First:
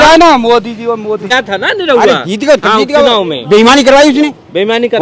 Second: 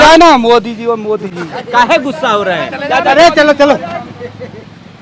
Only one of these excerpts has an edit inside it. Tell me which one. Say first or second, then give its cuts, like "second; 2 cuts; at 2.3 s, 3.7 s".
first; 1 cut; at 1.3 s